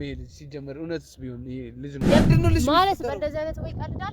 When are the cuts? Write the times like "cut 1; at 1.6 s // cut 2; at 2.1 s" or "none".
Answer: cut 1; at 2.2 s